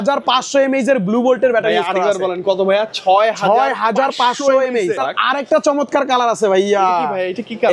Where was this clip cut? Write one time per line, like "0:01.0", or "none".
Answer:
0:05.0